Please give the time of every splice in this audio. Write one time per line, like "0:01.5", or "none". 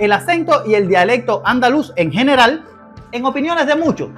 0:02.7